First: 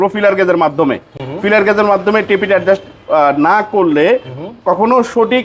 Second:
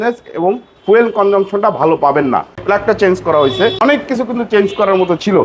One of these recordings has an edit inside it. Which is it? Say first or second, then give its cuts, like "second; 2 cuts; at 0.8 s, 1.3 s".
second; 2 cuts; at 2.6 s, 3.8 s